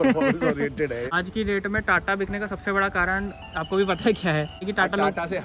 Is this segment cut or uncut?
cut